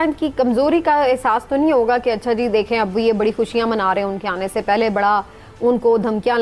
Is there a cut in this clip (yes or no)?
no